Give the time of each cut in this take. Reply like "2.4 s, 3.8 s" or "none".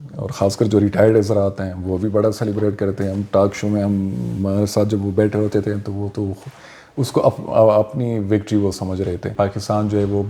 9.3 s